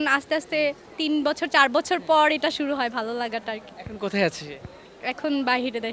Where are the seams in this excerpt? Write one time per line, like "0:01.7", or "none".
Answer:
none